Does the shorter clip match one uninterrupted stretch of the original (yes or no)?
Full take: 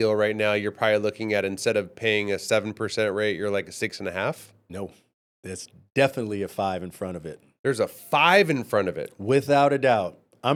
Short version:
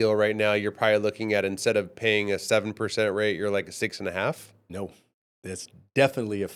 yes